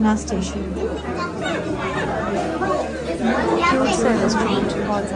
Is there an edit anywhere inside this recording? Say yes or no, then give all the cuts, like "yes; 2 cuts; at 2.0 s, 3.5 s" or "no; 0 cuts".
no; 0 cuts